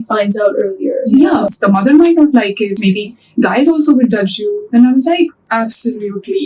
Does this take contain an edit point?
yes; 2 cuts; at 1.5 s, 5.4 s

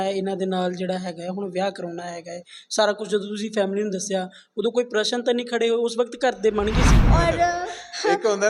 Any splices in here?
yes; 1 cut; at 7.0 s

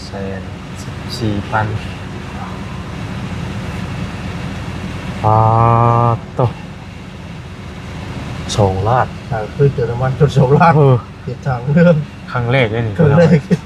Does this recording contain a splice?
no; 0 cuts

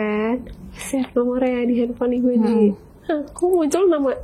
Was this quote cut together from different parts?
no; 0 cuts

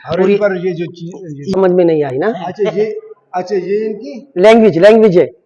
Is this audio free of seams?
no; 1 cut; at 1.5 s

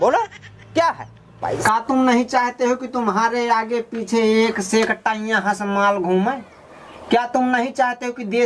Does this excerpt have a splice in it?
yes; 1 cut; at 1.5 s

